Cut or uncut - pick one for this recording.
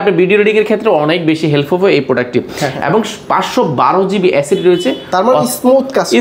uncut